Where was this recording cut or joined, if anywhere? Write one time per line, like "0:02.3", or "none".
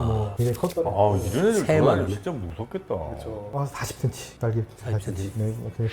0:03.5